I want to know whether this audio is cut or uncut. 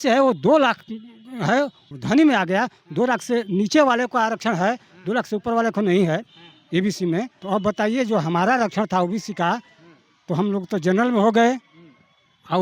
cut